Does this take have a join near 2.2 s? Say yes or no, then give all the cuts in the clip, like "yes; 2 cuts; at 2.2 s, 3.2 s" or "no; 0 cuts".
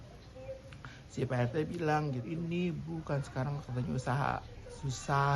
yes; 1 cut; at 2.2 s